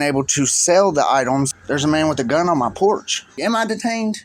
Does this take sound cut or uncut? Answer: cut